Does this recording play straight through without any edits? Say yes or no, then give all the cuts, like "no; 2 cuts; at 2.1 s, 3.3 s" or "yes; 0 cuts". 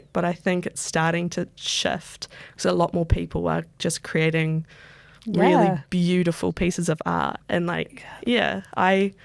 yes; 0 cuts